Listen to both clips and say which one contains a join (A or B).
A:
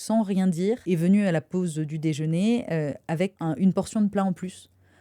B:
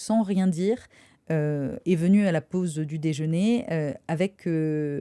A